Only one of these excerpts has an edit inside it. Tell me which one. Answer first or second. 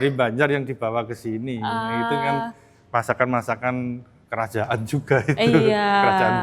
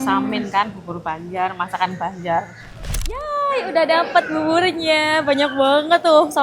second